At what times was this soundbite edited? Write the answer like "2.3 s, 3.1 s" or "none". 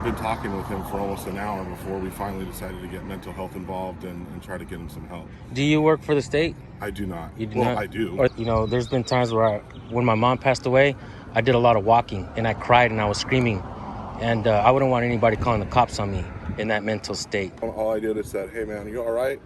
8.3 s, 17.7 s